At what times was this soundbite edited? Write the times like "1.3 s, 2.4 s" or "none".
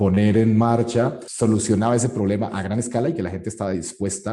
1.2 s